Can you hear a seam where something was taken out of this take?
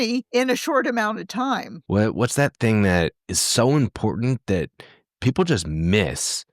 yes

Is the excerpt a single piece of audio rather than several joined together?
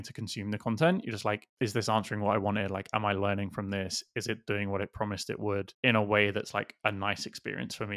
yes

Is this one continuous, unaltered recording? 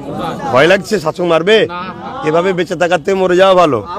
yes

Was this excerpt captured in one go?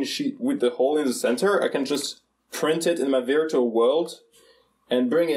yes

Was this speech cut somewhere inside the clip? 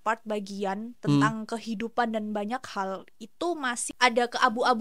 yes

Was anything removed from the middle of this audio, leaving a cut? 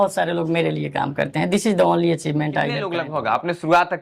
yes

